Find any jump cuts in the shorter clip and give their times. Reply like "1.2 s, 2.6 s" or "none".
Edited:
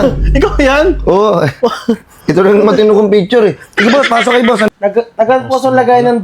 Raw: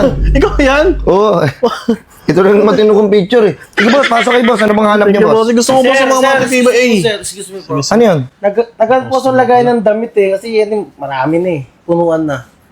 4.7 s

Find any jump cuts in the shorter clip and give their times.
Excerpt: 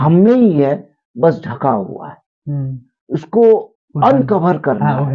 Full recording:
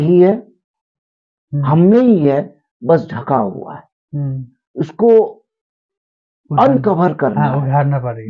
3.8 s

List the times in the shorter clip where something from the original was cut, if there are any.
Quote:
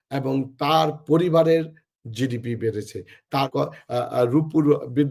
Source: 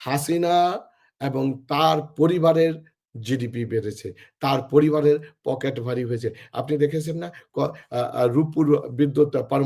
3.5 s

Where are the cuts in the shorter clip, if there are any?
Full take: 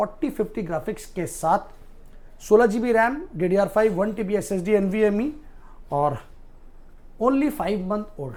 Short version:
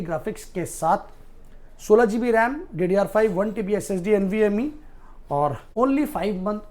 5.6 s

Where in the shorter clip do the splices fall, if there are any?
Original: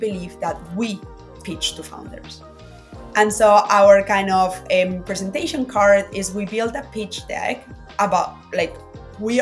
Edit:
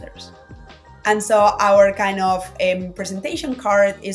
none

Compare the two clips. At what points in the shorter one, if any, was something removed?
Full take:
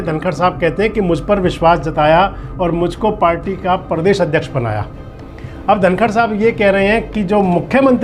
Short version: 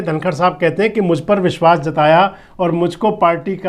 none

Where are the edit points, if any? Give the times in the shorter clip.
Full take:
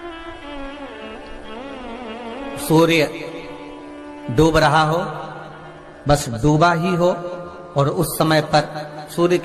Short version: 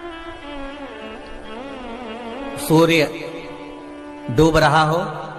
none

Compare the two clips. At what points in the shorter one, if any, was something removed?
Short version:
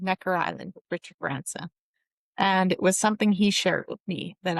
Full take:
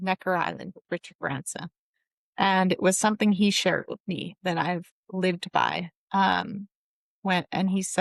none

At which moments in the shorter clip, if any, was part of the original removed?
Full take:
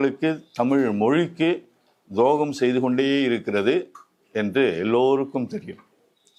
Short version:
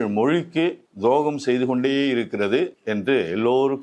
0.9 s, 2.8 s

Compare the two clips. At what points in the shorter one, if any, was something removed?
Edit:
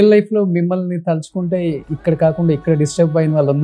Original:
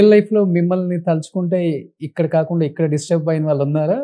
1.9 s

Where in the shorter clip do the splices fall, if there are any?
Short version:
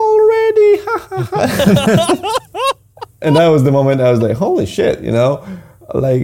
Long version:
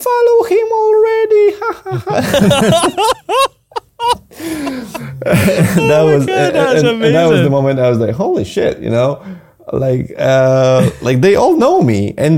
3.2 s

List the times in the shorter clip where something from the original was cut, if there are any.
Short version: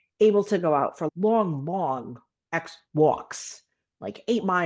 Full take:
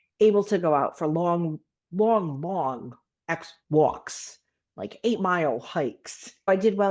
1.0 s

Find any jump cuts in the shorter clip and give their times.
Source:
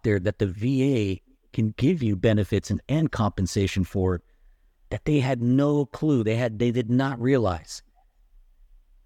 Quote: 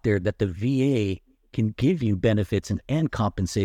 none

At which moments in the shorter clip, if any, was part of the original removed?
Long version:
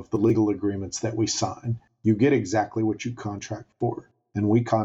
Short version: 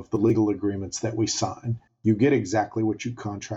none

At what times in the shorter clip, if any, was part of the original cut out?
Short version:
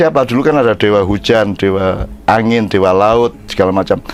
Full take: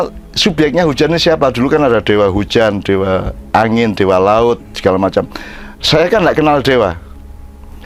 none

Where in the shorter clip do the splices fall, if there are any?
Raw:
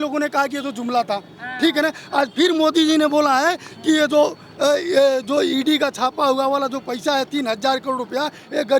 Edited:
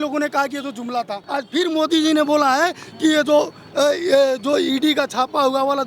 1.2 s

